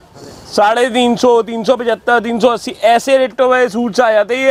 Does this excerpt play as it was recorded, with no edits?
yes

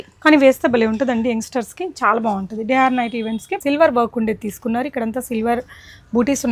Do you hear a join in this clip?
yes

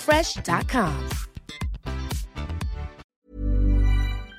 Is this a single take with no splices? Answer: no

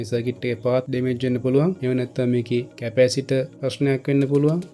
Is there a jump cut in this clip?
yes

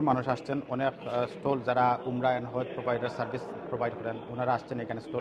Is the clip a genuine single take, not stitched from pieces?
yes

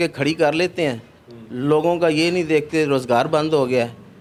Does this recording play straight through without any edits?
yes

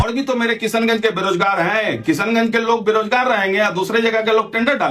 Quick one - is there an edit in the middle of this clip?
no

